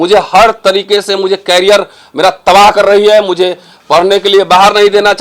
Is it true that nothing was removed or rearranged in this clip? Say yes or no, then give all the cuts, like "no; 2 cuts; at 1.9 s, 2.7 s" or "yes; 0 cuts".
yes; 0 cuts